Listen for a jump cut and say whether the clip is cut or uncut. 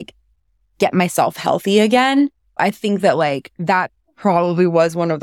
cut